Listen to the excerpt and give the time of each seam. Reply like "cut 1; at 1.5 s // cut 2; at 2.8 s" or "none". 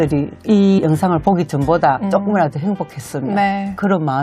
none